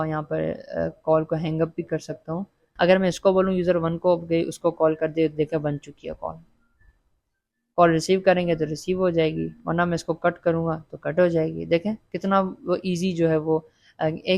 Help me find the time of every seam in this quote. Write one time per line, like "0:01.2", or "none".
0:02.6